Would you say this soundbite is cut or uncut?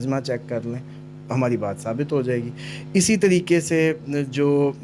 uncut